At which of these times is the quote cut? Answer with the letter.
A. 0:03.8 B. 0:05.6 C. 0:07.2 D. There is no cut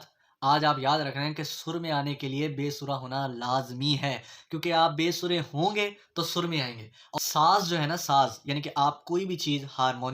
C